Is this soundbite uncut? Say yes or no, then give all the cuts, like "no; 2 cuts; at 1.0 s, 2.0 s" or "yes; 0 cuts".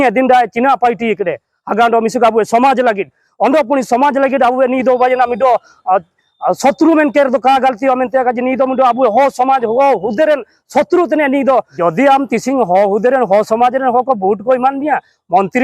no; 1 cut; at 11.7 s